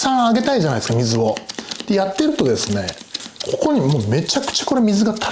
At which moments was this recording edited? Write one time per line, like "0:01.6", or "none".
none